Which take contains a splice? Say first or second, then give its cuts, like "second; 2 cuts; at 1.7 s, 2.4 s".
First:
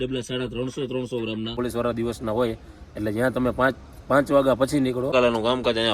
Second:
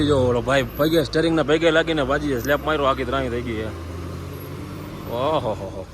first; 2 cuts; at 1.6 s, 5.1 s